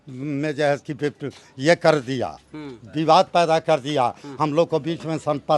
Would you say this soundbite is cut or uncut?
uncut